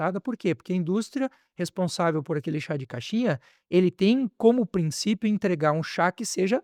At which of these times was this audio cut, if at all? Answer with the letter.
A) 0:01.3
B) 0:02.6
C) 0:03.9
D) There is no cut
D